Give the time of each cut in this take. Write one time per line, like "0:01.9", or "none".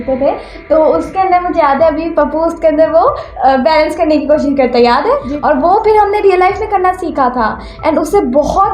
0:05.3